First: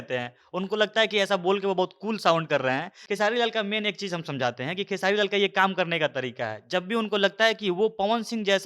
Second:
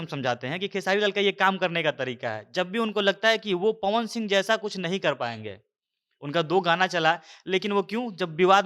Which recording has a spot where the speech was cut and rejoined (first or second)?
first